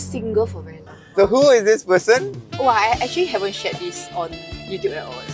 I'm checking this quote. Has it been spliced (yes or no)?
yes